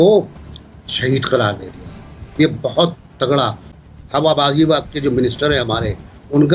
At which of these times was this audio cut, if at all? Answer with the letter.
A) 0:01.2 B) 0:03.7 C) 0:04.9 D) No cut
B